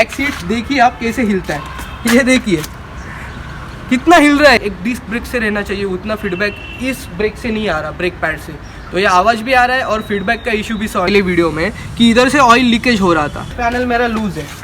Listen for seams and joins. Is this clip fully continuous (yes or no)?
no